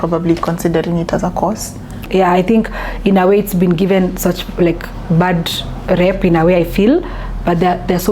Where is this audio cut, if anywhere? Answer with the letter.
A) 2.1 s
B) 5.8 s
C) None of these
A